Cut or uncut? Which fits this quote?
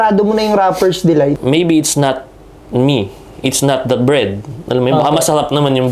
cut